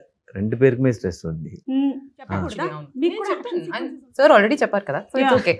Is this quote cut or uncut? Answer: cut